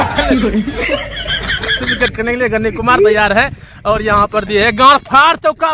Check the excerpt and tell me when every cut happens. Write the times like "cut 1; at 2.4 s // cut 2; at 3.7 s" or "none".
cut 1; at 1.8 s